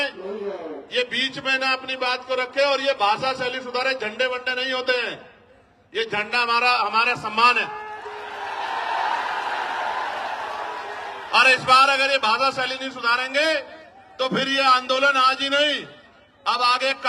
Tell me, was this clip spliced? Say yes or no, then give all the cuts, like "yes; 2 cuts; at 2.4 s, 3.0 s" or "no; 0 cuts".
no; 0 cuts